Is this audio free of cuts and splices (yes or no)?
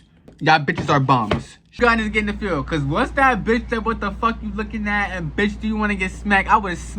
no